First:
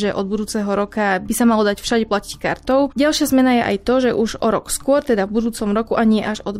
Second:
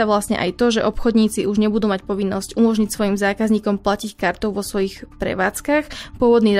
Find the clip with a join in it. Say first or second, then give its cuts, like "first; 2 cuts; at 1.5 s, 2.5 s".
first; 2 cuts; at 1.2 s, 2.9 s